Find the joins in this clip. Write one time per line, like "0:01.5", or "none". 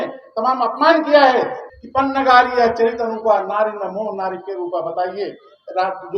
0:01.6